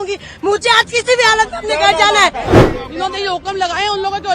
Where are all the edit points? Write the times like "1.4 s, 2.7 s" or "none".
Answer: 2.5 s